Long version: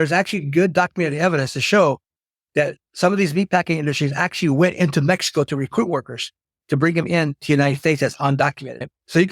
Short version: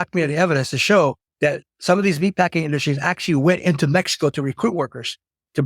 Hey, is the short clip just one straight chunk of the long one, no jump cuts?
no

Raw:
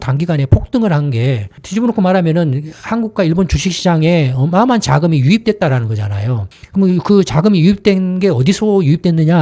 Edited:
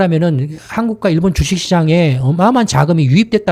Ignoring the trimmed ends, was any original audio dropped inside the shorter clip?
no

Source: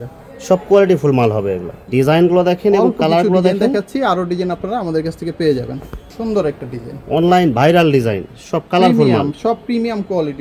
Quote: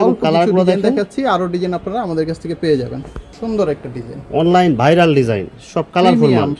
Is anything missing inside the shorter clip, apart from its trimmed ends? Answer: no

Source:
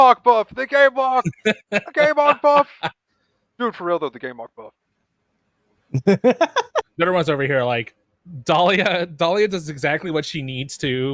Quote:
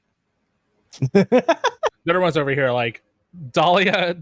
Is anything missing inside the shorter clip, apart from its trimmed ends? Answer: no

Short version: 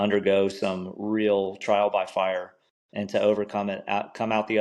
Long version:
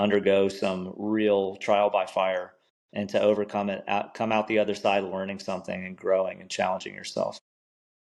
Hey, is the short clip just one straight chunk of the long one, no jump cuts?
yes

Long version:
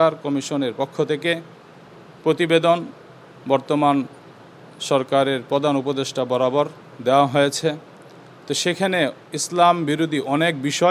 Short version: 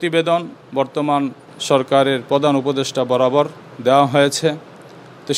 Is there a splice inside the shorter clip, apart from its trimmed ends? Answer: yes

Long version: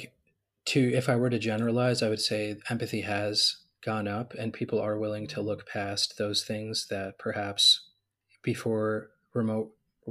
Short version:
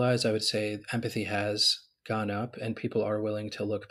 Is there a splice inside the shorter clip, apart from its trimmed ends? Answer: no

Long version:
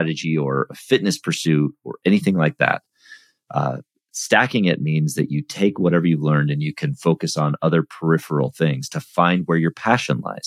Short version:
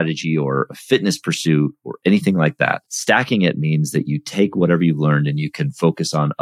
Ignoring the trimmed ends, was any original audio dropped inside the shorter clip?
yes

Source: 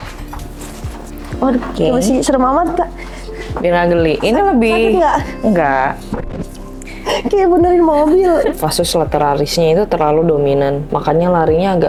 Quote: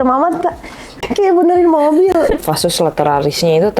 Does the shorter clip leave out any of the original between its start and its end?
yes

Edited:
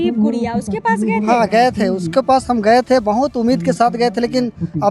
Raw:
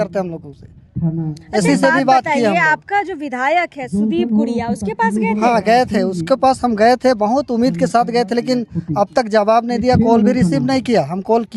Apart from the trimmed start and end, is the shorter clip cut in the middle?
no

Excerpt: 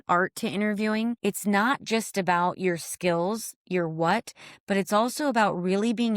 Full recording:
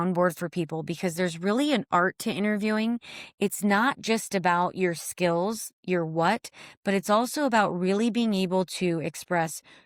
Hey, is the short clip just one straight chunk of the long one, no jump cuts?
no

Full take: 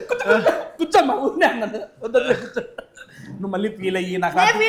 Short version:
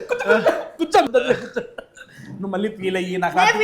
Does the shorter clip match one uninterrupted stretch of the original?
no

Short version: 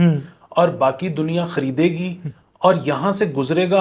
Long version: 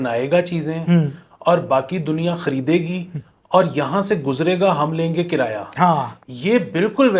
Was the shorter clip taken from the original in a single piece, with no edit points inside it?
yes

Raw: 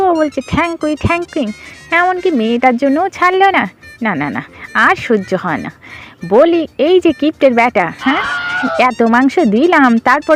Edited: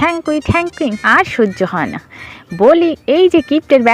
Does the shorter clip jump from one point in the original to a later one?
yes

